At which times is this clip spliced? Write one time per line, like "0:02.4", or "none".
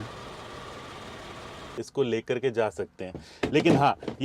0:01.8